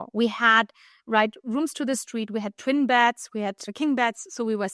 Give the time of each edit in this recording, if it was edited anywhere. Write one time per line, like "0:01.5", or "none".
0:03.7